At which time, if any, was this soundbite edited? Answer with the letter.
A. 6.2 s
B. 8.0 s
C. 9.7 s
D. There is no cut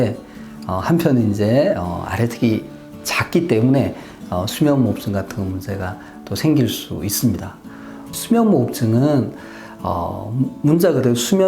B